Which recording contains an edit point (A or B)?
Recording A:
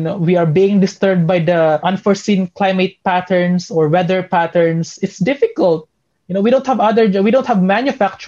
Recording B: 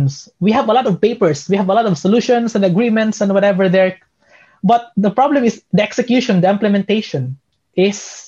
A